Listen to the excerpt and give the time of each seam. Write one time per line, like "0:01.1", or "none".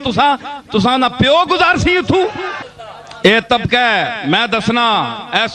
none